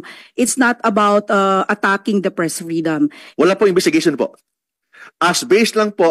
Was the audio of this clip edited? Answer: yes; 1 cut; at 3.2 s

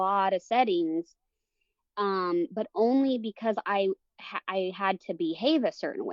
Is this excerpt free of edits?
yes; 0 cuts

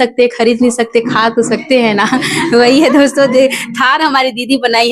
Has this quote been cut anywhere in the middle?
no; 0 cuts

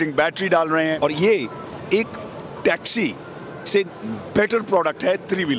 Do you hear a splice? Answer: yes; 1 cut; at 1.0 s

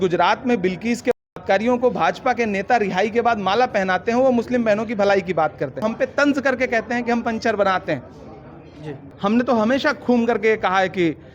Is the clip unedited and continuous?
no; 2 cuts; at 5.8 s, 9.0 s

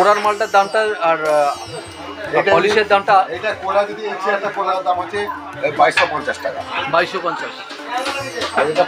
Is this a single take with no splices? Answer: no; 1 cut; at 4.7 s

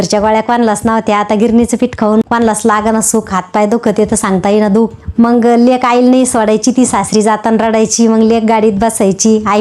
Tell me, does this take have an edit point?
yes; 2 cuts; at 2.3 s, 5.0 s

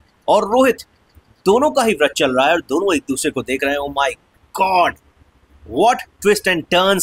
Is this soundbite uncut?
yes; 0 cuts

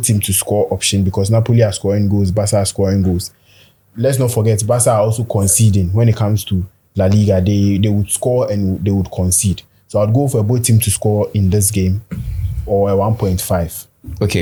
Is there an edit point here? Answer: no; 0 cuts

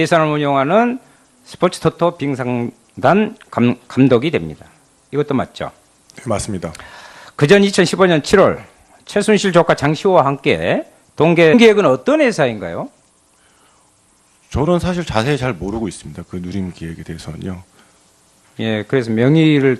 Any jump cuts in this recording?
no; 0 cuts

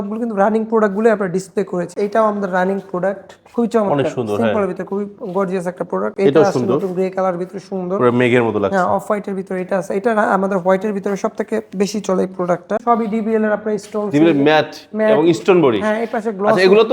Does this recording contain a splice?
yes; 2 cuts; at 1.9 s, 12.8 s

